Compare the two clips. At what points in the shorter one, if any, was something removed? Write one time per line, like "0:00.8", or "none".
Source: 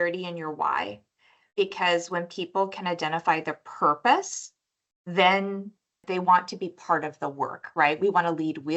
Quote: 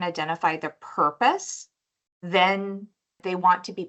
none